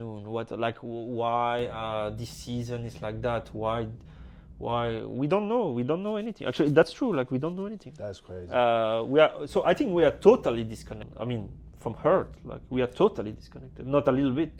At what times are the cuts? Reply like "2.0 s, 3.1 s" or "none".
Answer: 11.0 s

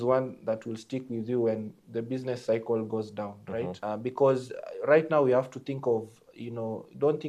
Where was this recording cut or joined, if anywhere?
3.8 s

